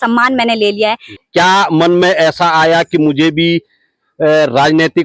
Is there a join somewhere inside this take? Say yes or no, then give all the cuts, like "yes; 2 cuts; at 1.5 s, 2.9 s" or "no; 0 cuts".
yes; 1 cut; at 1.1 s